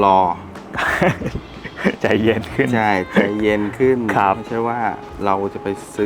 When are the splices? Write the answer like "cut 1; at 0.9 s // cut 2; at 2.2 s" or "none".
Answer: none